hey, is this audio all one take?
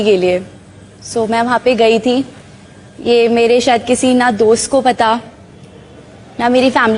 yes; 0 cuts

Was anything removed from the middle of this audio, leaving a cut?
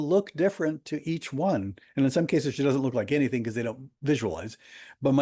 no; 0 cuts

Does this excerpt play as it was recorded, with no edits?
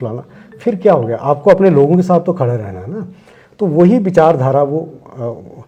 yes; 0 cuts

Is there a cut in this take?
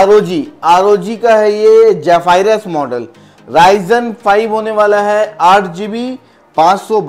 no; 0 cuts

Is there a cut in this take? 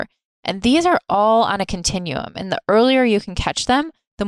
no; 0 cuts

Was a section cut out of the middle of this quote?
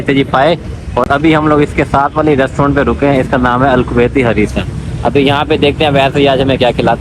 no; 0 cuts

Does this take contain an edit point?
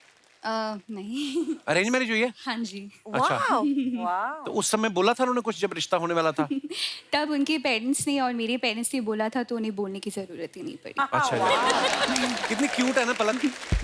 no; 0 cuts

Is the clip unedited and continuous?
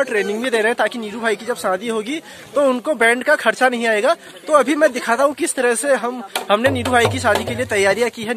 yes; 0 cuts

